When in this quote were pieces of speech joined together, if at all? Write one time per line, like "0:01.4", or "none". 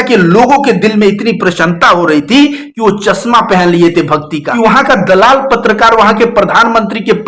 0:04.4

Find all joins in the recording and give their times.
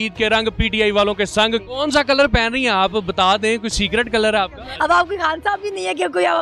0:01.7
0:04.6

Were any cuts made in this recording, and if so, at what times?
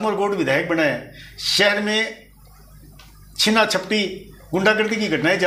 none

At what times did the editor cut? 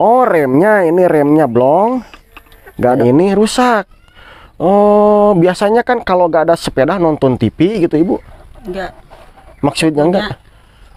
0:03.0

